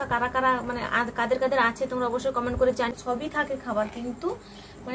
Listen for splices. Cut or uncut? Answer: cut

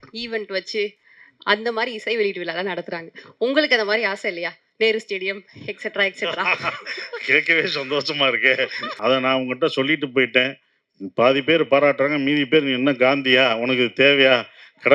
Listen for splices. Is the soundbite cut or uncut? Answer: cut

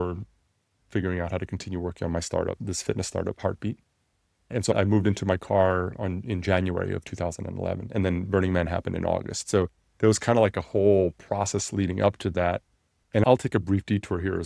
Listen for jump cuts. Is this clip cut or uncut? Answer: cut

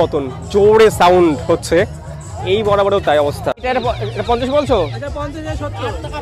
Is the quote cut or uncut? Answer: uncut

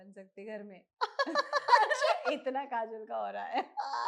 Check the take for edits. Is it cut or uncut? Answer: uncut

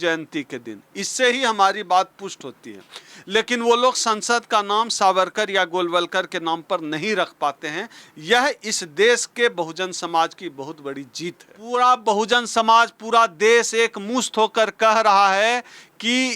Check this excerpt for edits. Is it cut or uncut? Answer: cut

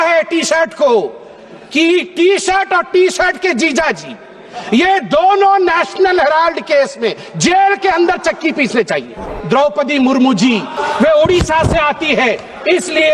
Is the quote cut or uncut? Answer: cut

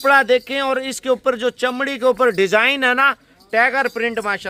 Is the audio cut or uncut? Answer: uncut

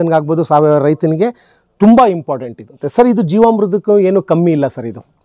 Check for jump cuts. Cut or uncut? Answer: cut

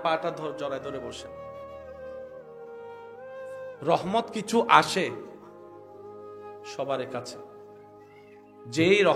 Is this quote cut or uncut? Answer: cut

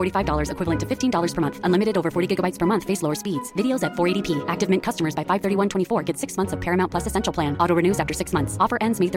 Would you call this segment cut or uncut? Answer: uncut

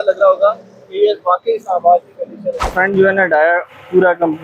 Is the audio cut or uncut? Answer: cut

